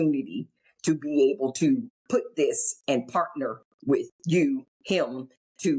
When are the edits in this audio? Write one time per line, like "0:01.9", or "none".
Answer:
0:01.9
0:04.7